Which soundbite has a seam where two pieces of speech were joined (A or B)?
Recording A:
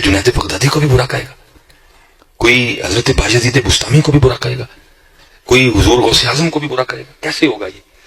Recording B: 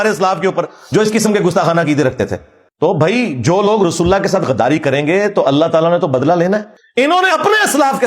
B